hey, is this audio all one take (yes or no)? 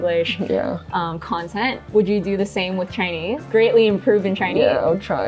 no